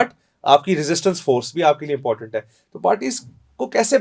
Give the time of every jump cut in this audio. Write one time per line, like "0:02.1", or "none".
none